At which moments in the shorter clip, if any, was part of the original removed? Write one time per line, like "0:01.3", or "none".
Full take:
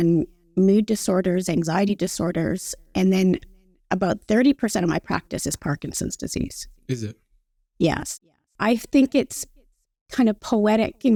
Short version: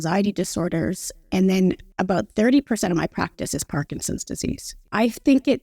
0:01.9
0:04.7